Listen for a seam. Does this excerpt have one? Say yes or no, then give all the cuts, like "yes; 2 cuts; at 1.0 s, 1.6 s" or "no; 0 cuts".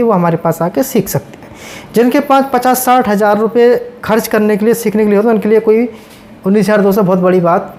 no; 0 cuts